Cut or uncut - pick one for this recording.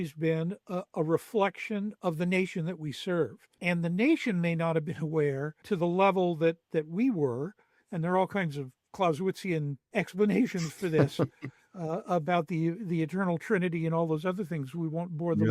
cut